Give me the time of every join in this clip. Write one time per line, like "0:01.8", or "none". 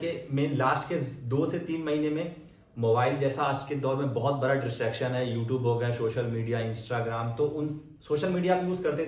none